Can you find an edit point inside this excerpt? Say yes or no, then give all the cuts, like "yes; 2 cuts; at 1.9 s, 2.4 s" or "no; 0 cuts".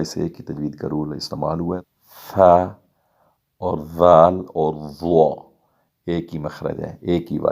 yes; 1 cut; at 1.9 s